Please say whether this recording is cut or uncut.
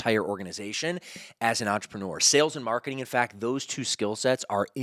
uncut